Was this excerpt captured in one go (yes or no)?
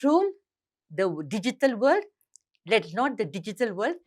yes